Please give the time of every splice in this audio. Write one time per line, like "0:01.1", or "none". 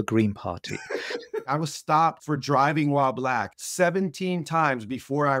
0:01.5
0:02.2
0:03.5